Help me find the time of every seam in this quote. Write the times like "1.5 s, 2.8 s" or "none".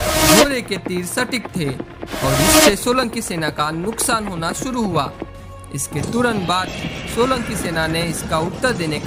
none